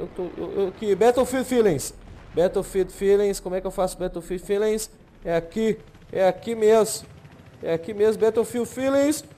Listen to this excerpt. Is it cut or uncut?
uncut